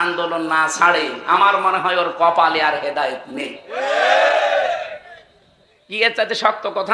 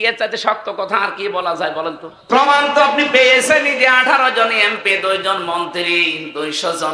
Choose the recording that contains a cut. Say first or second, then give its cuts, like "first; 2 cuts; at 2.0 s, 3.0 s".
second; 1 cut; at 2.1 s